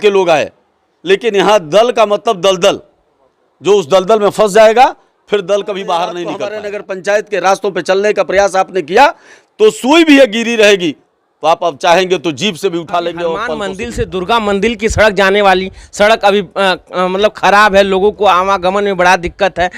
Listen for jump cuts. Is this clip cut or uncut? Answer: cut